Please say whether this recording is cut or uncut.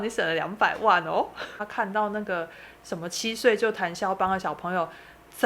cut